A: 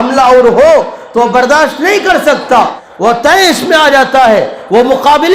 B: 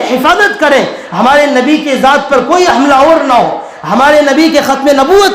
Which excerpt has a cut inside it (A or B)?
A